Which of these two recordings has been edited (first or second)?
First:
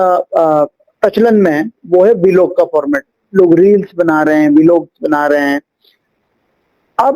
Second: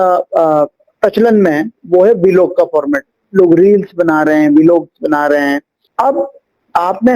second